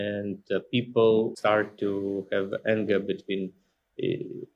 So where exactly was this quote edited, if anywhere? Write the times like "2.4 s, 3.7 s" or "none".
1.3 s